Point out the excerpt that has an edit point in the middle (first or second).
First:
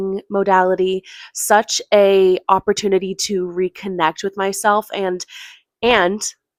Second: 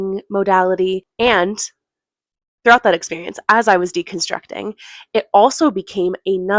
second